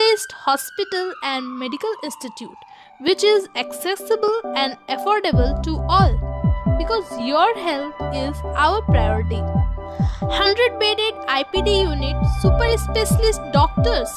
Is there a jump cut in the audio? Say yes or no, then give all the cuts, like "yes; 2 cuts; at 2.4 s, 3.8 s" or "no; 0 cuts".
no; 0 cuts